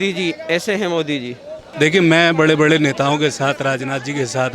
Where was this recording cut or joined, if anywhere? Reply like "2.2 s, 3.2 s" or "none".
1.6 s